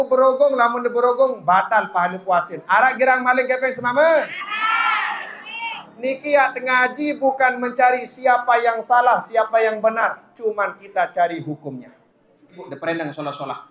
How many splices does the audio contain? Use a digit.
2